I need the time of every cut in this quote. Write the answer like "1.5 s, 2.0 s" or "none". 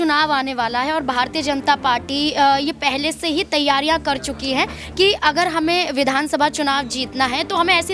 1.3 s